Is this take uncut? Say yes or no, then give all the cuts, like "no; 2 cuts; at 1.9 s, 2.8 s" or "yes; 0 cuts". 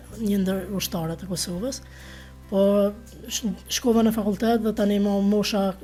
yes; 0 cuts